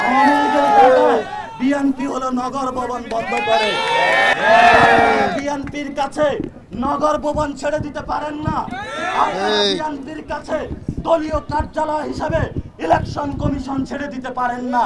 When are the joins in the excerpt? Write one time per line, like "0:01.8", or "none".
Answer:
0:04.3